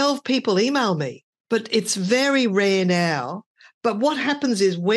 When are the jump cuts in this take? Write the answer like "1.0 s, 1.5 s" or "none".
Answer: none

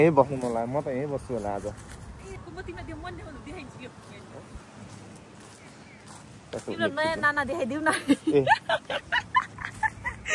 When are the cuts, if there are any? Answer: none

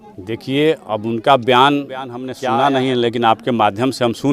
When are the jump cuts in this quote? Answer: 2.2 s

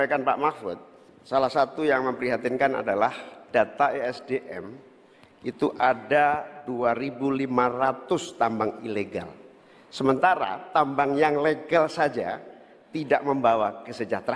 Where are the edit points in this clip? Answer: none

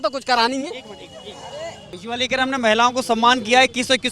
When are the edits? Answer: 2.0 s

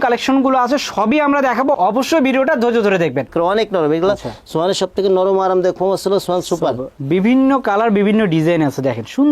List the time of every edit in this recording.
3.3 s, 6.9 s

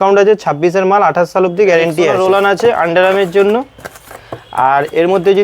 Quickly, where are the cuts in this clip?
2.2 s

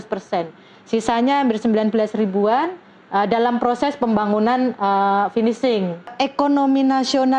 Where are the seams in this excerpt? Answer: 6.1 s

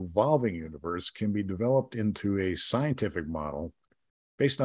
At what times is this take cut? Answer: none

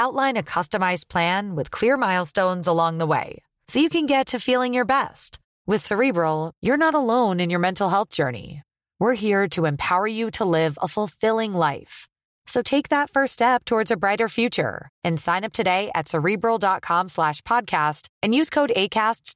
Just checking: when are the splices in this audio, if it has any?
none

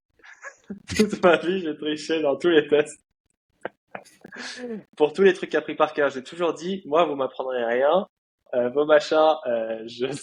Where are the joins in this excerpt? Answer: none

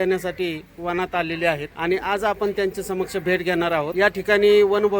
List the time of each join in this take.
1.7 s, 3.9 s

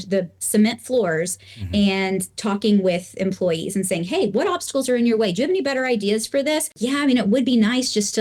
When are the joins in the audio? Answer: 6.7 s

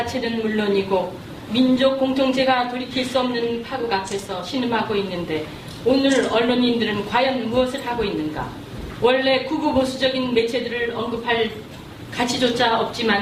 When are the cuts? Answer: none

